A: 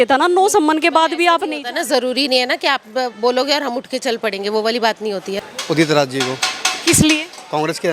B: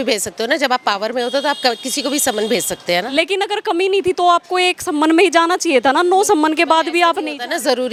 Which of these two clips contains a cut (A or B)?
A